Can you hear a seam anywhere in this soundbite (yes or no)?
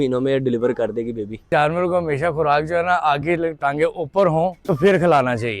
yes